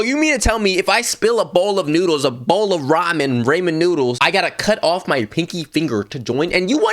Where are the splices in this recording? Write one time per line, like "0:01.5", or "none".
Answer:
0:04.2